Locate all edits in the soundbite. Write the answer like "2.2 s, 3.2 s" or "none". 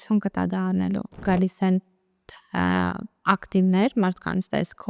1.2 s